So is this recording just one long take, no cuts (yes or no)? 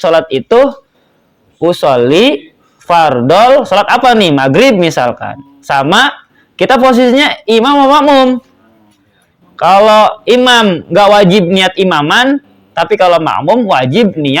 yes